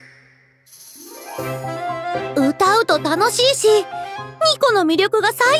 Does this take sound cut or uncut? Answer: cut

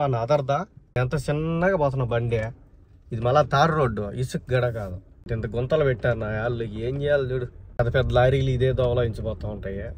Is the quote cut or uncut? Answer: uncut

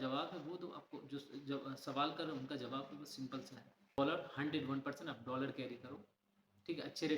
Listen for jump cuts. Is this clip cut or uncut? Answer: cut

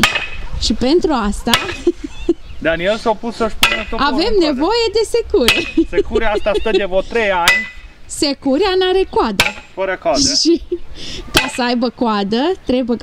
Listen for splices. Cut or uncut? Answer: uncut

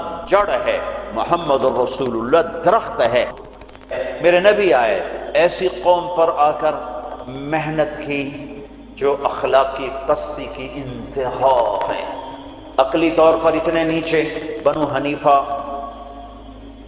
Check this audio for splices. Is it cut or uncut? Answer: cut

